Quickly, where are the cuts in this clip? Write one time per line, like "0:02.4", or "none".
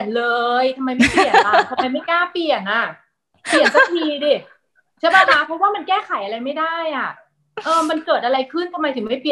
none